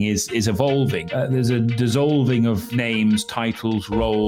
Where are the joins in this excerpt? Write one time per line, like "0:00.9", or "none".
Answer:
0:01.0
0:02.7